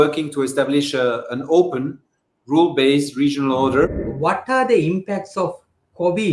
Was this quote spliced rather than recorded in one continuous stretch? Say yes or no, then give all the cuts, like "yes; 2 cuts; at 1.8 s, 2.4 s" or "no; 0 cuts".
yes; 1 cut; at 3.9 s